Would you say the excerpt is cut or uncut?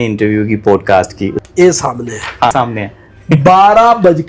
cut